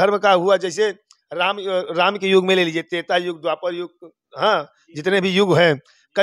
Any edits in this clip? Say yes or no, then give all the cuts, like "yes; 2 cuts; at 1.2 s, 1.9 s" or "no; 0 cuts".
no; 0 cuts